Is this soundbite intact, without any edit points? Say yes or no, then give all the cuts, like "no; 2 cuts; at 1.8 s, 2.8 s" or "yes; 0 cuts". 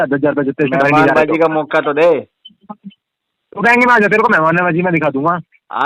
yes; 0 cuts